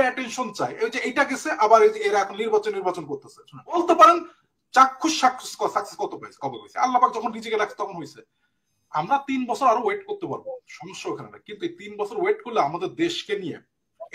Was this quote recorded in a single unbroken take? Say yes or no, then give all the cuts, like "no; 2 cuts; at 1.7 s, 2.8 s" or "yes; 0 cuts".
no; 1 cut; at 3.8 s